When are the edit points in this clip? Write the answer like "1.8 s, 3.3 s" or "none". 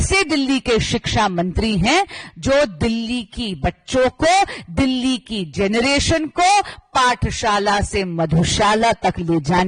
none